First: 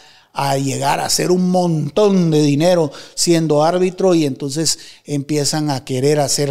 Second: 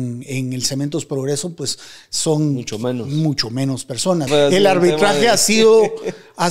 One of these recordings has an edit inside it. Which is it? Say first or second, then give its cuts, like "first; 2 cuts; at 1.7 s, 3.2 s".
second; 1 cut; at 4.3 s